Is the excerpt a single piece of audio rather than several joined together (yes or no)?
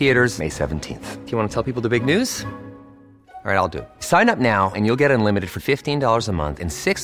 yes